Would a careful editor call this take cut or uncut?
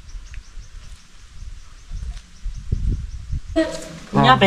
cut